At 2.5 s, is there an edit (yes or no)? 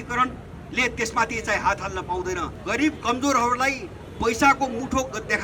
yes